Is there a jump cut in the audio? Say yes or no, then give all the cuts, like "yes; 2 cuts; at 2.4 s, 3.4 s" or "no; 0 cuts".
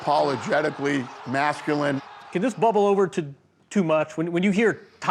yes; 1 cut; at 1.2 s